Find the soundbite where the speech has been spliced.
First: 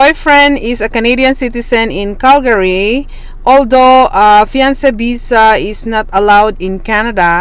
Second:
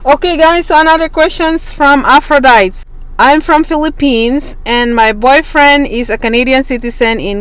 second; 1 cut; at 2.8 s

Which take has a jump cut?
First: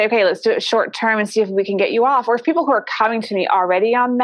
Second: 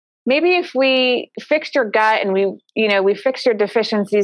second; 1 cut; at 1.3 s

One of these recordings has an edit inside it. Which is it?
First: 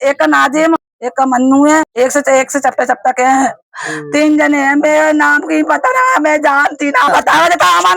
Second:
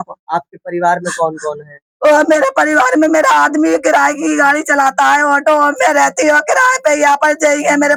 first; 3 cuts; at 0.9 s, 1.9 s, 7.1 s

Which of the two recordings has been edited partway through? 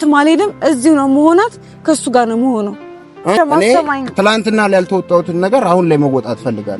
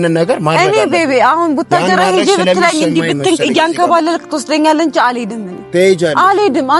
first; 1 cut; at 3.4 s

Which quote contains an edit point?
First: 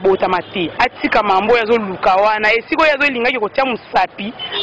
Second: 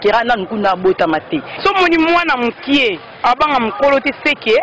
second; 1 cut; at 1.4 s

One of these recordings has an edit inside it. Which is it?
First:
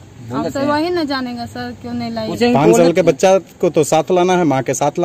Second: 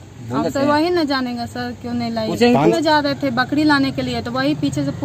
second; 1 cut; at 2.7 s

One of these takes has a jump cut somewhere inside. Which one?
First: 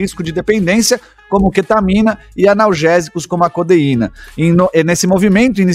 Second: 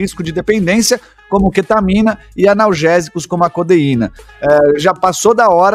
second; 1 cut; at 4.3 s

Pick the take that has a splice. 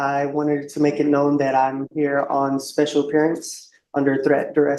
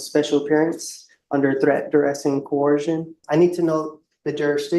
second; 1 cut; at 3.2 s

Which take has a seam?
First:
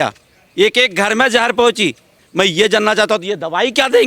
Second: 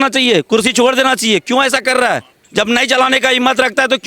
first; 1 cut; at 2.2 s

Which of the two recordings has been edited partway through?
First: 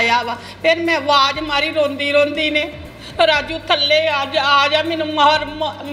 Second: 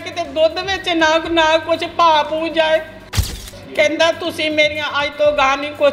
second; 1 cut; at 3.4 s

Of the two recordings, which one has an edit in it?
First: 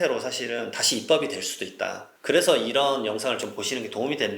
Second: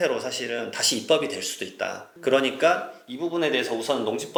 first; 1 cut; at 2.1 s

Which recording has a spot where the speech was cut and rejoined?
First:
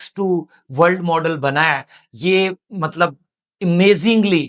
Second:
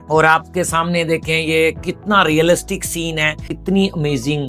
second; 1 cut; at 3.5 s

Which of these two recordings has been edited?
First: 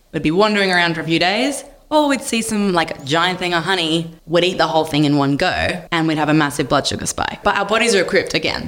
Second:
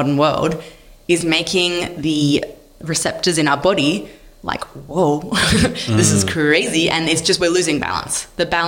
first; 3 cuts; at 4.2 s, 5.8 s, 7.4 s

